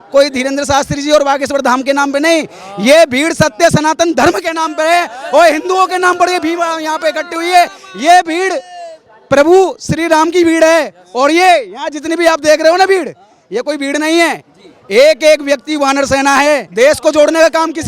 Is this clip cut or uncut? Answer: cut